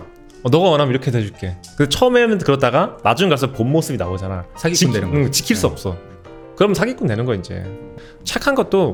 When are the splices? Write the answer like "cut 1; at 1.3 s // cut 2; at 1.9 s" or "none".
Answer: none